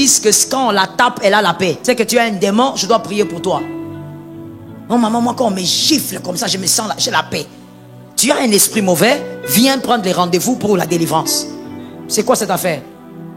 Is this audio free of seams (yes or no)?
no